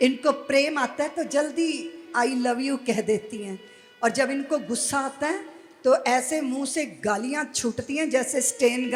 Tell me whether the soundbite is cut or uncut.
uncut